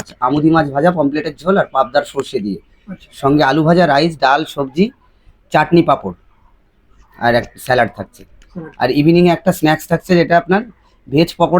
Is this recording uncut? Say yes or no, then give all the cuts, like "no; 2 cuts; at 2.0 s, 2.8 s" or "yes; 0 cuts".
yes; 0 cuts